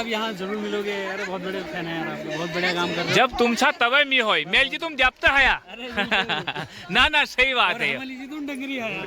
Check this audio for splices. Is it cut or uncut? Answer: uncut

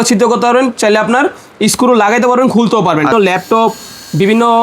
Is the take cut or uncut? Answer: cut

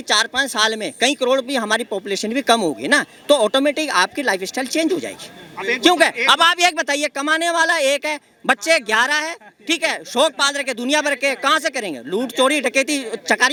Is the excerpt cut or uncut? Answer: uncut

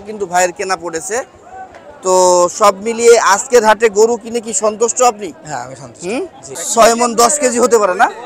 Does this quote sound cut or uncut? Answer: cut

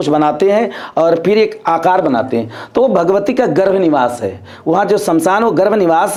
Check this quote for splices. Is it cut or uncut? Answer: uncut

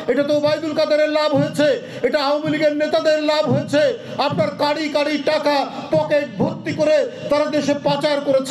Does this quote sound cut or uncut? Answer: uncut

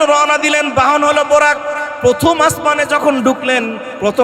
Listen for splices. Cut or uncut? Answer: cut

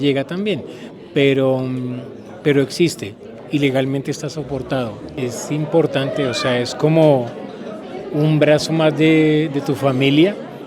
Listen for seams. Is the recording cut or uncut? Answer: cut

